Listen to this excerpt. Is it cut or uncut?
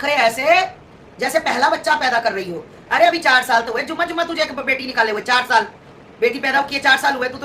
uncut